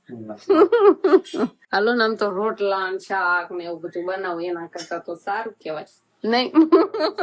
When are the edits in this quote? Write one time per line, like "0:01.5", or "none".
0:01.6